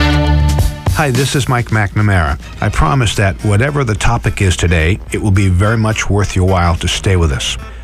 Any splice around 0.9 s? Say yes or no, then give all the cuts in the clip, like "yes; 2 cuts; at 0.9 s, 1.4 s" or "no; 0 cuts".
yes; 1 cut; at 0.9 s